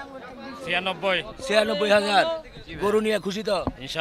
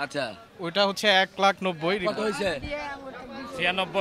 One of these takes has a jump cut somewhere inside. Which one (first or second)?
second